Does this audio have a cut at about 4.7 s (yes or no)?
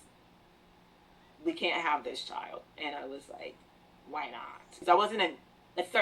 yes